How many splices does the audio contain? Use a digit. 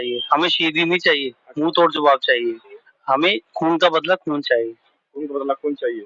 1